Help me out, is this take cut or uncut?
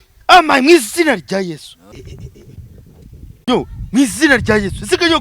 uncut